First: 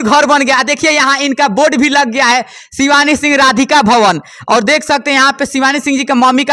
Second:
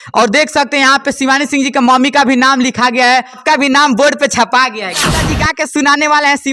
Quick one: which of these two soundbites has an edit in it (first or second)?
second